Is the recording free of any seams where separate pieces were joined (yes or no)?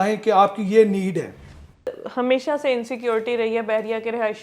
no